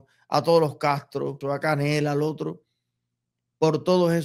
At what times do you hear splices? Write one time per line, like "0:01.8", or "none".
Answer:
0:01.4